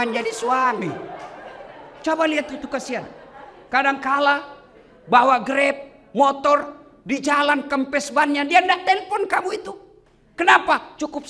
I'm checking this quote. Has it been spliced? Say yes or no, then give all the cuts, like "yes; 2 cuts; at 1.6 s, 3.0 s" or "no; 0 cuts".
no; 0 cuts